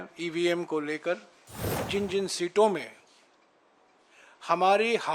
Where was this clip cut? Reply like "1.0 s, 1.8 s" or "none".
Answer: 1.8 s